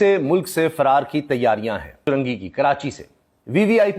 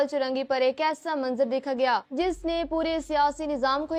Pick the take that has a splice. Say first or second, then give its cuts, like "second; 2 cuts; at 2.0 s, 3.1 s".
first; 1 cut; at 2.0 s